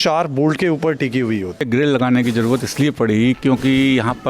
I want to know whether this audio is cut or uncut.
cut